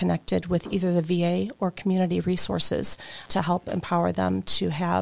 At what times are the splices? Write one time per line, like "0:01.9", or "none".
0:03.3